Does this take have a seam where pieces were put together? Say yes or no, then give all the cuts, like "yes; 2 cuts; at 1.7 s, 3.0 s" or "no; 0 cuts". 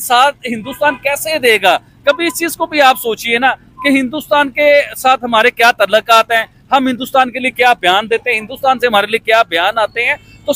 no; 0 cuts